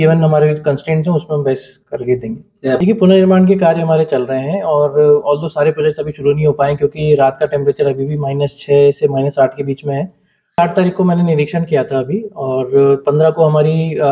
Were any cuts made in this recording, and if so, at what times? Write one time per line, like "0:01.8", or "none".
0:02.8
0:10.6